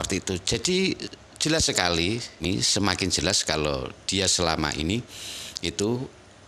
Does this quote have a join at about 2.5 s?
yes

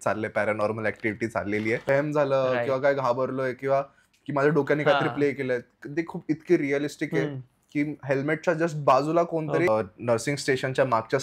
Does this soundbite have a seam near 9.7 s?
yes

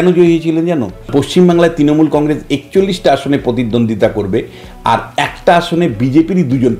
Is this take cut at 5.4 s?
no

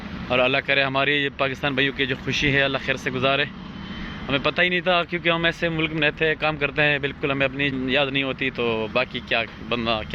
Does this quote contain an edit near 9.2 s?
no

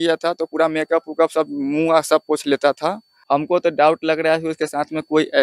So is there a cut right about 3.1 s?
yes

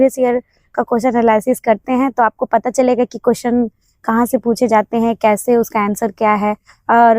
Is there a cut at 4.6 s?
no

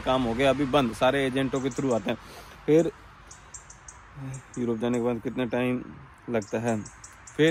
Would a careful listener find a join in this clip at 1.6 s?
no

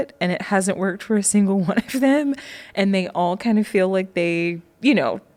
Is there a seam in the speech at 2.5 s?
no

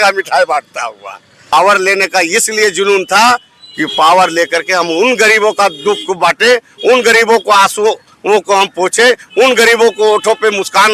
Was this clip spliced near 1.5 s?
yes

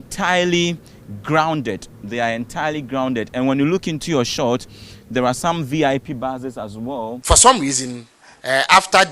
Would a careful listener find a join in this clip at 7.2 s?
yes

